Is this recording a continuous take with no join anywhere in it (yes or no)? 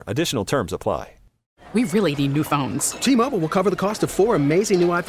no